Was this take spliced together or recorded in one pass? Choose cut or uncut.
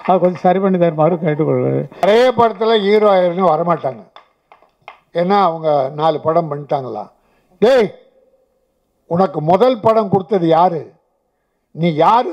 cut